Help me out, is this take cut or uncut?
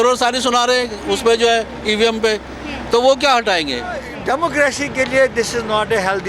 cut